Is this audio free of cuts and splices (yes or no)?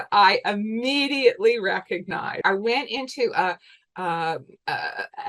no